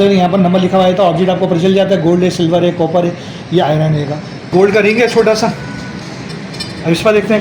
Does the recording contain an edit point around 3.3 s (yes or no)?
no